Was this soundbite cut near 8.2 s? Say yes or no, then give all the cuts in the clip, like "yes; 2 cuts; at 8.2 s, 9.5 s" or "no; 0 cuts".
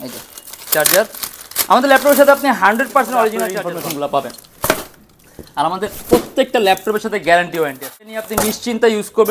yes; 2 cuts; at 3.5 s, 8.2 s